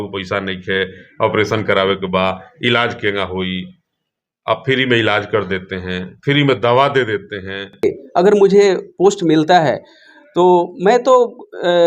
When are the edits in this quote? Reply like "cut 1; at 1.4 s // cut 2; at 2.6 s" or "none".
cut 1; at 7.8 s